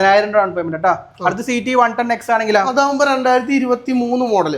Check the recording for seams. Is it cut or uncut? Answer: uncut